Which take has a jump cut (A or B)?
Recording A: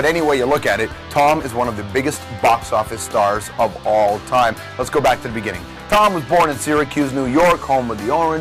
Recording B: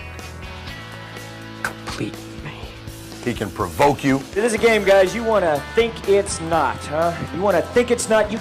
B